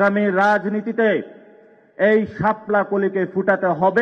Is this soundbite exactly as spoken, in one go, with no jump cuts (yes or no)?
yes